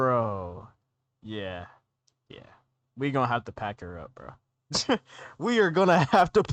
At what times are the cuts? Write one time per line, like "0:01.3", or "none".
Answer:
none